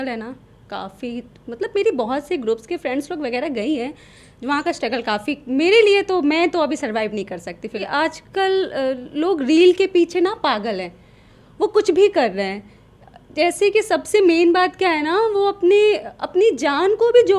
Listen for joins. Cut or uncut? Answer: cut